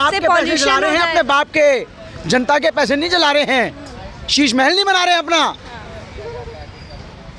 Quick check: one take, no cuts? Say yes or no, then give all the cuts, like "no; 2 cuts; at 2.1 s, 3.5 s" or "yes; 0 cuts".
yes; 0 cuts